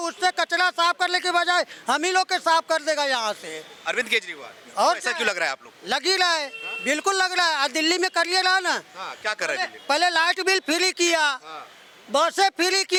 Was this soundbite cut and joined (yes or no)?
no